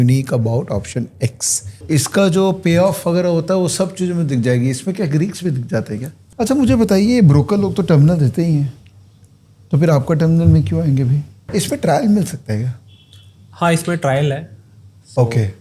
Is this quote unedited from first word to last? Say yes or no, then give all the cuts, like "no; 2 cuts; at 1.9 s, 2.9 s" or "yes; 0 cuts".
no; 3 cuts; at 1.8 s, 6.2 s, 11.5 s